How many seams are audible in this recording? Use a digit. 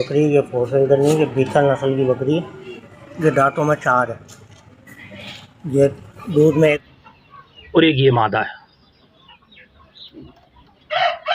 1